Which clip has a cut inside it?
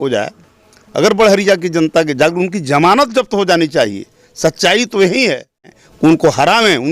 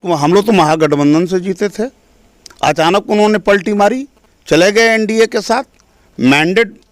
first; 1 cut; at 5.7 s

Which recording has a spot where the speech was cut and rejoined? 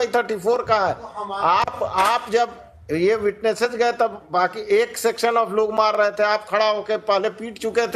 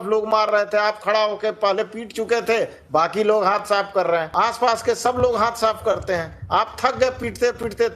second; 1 cut; at 4.3 s

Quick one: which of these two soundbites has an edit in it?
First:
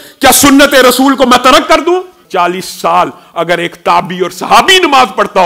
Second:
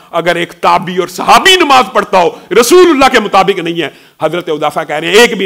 first; 1 cut; at 2.2 s

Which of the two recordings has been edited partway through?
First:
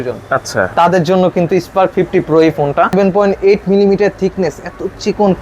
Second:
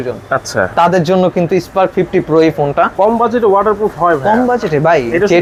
first; 1 cut; at 2.9 s

